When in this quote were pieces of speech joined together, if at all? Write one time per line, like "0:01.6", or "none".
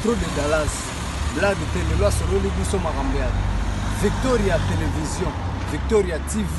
none